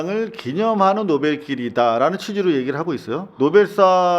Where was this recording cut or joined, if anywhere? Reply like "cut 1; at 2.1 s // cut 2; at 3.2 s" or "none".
cut 1; at 3.3 s